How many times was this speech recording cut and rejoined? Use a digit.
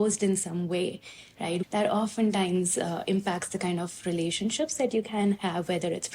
1